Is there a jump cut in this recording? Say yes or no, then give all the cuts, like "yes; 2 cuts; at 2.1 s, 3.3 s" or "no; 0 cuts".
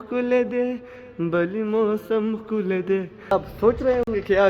yes; 1 cut; at 3.3 s